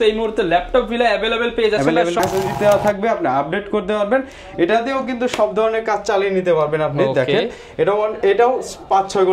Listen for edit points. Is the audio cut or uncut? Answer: cut